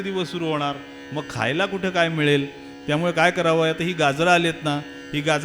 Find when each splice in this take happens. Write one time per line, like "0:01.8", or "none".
none